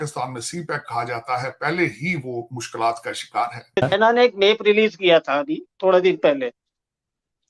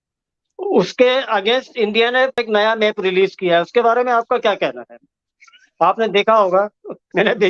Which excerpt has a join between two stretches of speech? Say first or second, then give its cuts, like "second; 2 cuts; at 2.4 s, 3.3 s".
first; 1 cut; at 3.8 s